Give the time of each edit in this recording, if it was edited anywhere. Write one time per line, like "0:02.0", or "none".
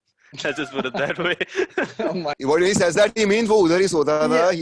0:02.4